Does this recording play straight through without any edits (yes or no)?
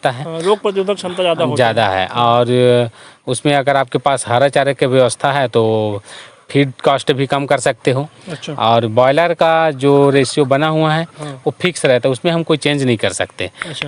yes